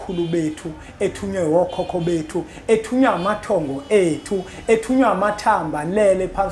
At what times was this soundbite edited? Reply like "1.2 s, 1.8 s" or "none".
none